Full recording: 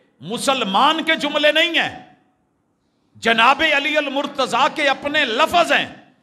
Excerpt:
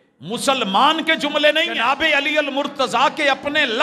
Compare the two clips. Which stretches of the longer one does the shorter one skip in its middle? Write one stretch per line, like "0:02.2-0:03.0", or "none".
0:01.9-0:03.5